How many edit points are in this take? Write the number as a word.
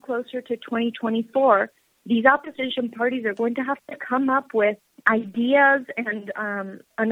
one